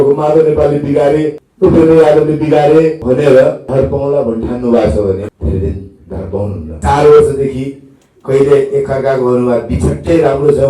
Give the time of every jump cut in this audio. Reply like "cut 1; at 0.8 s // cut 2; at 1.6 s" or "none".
cut 1; at 1.4 s // cut 2; at 3.0 s // cut 3; at 3.6 s // cut 4; at 5.3 s // cut 5; at 6.6 s